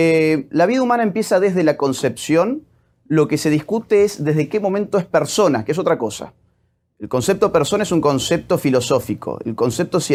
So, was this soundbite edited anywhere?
no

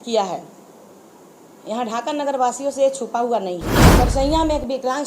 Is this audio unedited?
no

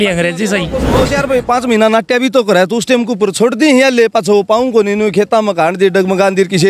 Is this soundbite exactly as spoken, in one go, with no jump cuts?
no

